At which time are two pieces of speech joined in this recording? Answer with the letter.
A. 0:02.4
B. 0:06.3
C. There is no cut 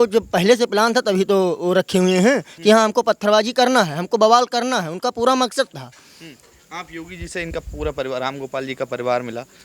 C